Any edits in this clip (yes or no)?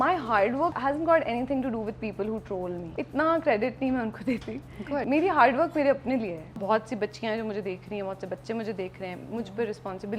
yes